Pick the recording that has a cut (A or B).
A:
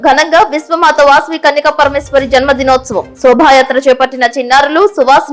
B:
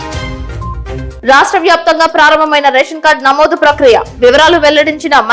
B